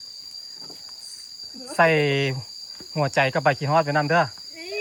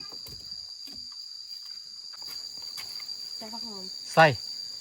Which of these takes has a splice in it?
second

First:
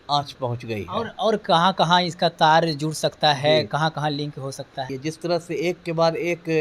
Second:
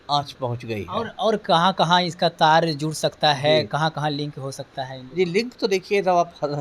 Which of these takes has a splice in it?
first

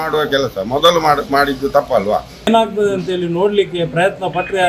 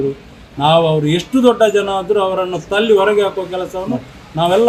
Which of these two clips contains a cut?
first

